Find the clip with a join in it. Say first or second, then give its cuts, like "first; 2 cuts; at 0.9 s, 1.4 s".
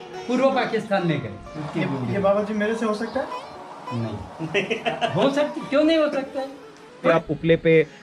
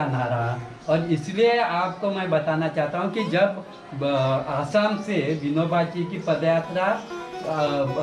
first; 2 cuts; at 1.6 s, 7.1 s